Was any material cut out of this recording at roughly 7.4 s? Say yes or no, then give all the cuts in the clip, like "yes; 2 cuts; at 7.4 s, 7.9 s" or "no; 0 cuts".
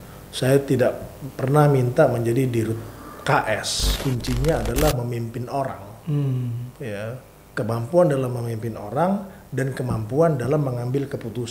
no; 1 cut; at 3.9 s